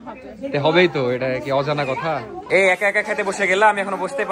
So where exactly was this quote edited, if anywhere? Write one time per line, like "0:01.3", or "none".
0:02.3